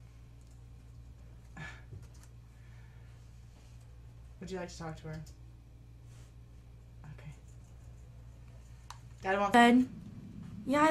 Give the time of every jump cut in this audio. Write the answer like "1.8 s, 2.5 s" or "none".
5.2 s